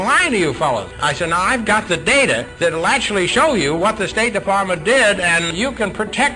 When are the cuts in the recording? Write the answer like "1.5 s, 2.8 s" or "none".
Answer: 1.0 s, 2.5 s, 5.5 s